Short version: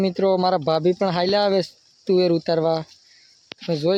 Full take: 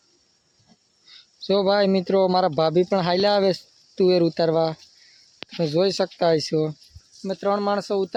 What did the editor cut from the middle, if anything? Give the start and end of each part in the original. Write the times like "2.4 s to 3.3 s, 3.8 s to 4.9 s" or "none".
none